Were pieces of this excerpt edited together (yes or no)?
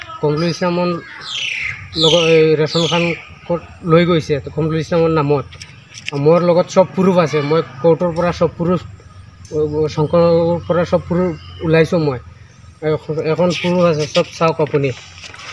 no